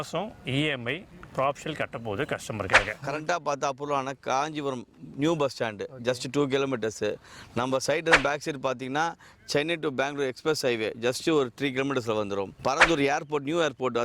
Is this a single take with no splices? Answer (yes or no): no